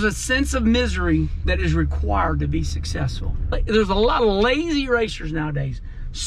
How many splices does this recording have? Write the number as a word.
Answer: two